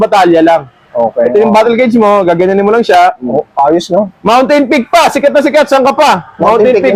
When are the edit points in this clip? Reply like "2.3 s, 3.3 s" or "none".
none